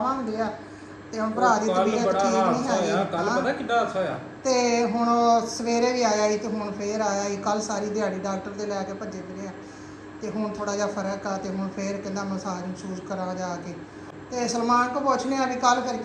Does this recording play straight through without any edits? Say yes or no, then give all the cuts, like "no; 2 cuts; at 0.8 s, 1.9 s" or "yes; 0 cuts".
no; 1 cut; at 14.1 s